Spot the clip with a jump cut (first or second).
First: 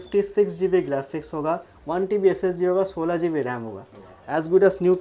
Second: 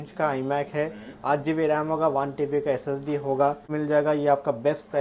second